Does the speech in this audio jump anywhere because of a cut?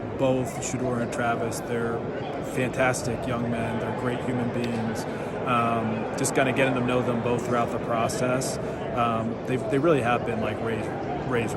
no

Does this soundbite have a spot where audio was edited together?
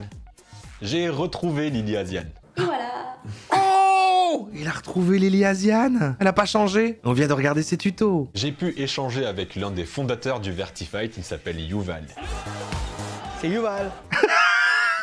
yes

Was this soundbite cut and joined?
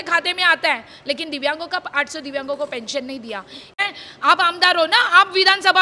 yes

